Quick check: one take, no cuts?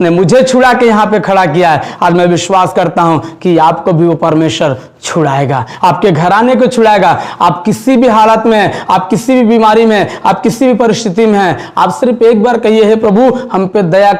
yes; 0 cuts

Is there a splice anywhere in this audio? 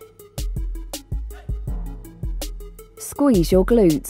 yes; 1 cut; at 3.1 s

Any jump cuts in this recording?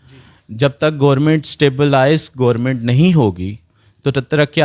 no; 0 cuts

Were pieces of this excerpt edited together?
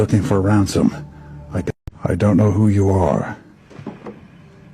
no; 0 cuts

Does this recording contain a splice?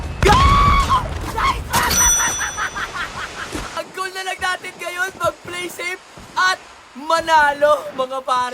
yes; 1 cut; at 3.8 s

